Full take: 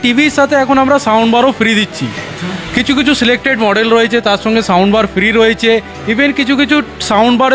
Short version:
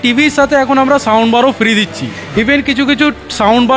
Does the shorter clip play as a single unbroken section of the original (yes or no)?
no